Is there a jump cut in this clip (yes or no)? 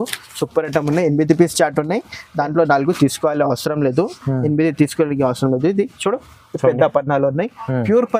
no